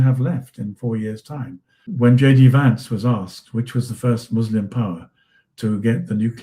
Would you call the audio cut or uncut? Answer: cut